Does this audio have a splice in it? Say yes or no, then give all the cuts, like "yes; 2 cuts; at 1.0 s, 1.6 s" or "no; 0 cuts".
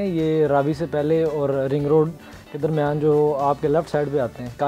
no; 0 cuts